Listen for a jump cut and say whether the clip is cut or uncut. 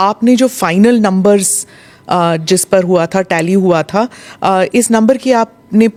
uncut